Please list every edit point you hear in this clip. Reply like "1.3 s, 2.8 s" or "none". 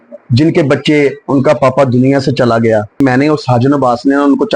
3.0 s